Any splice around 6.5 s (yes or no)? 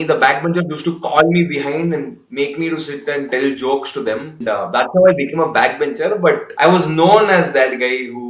yes